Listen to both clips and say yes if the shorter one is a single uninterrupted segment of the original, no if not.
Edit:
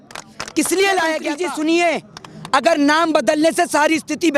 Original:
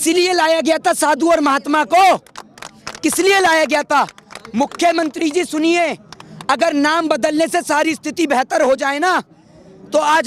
no